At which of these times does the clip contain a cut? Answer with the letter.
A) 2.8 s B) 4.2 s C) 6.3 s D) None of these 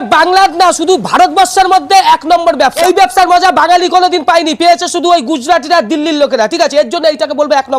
A